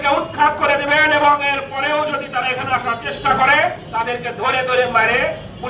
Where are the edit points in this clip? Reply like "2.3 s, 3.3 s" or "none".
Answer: none